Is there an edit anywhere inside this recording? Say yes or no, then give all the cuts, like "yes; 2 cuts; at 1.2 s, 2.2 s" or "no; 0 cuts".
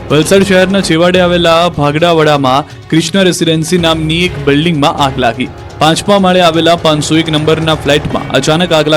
no; 0 cuts